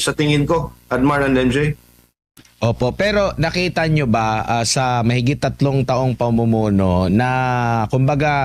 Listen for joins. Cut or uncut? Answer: uncut